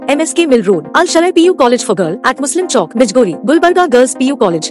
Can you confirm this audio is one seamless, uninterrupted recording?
yes; 0 cuts

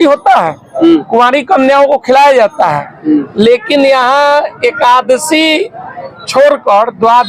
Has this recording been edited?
no; 0 cuts

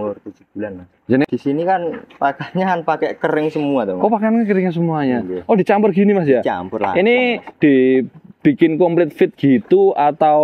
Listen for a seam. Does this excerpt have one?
yes; 1 cut; at 1.3 s

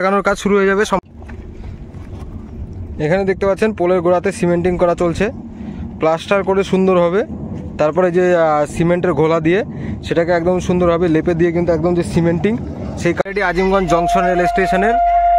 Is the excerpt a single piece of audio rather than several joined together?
no; 2 cuts; at 1.0 s, 13.2 s

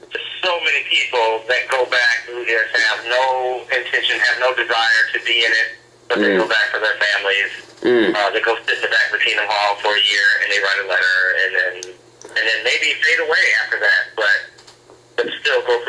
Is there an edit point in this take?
yes; 1 cut; at 13.6 s

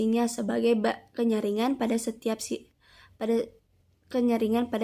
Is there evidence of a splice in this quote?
no; 0 cuts

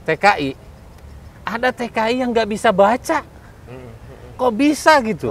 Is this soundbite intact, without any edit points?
yes; 0 cuts

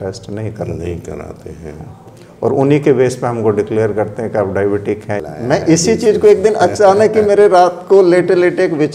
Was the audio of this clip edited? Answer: yes; 1 cut; at 5.2 s

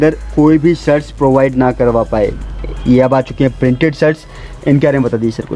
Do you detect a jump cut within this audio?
no; 0 cuts

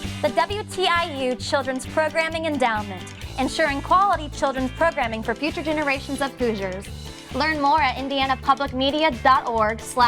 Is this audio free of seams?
yes; 0 cuts

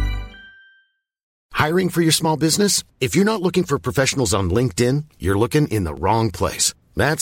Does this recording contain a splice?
yes; 1 cut; at 1.2 s

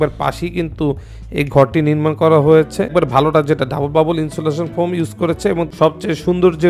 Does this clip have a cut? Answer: yes; 2 cuts; at 2.9 s, 5.7 s

